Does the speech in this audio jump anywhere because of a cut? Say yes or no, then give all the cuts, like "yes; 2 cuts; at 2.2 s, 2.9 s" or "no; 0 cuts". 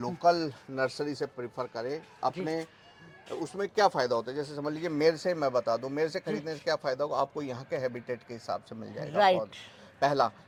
no; 0 cuts